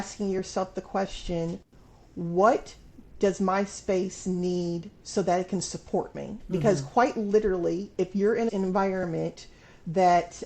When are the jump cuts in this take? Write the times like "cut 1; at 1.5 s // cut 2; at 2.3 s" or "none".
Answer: cut 1; at 8.5 s